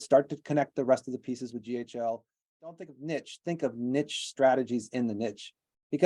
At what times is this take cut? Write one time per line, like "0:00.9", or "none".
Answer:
0:02.7